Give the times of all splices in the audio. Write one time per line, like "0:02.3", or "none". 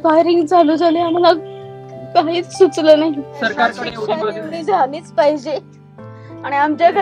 0:03.3